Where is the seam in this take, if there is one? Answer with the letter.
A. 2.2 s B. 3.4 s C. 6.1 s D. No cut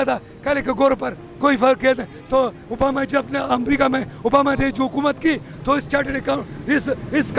D